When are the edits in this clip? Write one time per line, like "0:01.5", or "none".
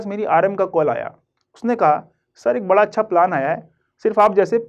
none